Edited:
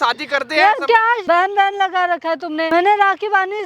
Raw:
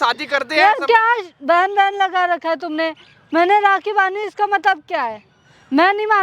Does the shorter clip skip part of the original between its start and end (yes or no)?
yes